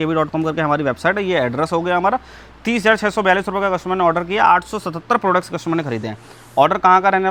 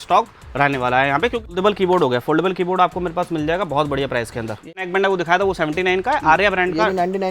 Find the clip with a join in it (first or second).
second